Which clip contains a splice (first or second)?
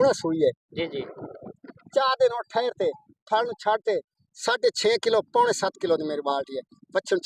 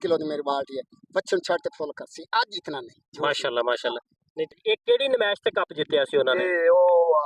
second